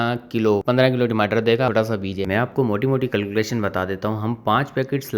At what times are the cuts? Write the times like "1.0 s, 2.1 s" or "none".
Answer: 1.7 s